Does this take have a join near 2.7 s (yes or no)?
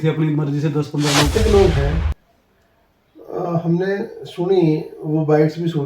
no